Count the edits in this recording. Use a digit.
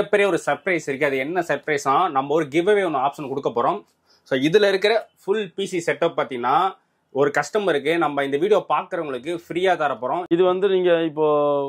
1